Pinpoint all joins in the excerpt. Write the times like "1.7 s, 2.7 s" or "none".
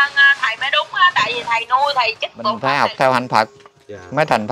2.6 s